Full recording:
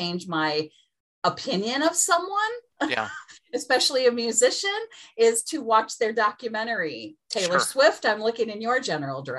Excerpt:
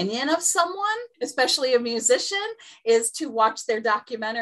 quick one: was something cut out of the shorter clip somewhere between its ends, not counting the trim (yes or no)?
yes